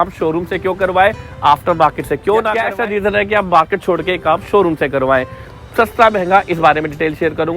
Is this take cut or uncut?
cut